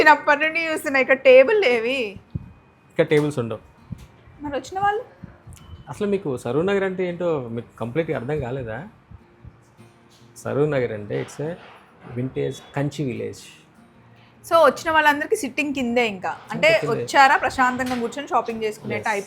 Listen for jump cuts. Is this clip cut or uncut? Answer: uncut